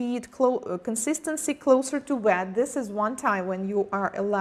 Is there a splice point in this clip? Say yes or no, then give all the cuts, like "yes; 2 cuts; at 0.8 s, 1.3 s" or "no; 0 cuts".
no; 0 cuts